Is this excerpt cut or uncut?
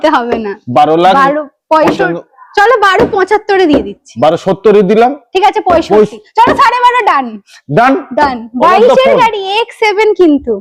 uncut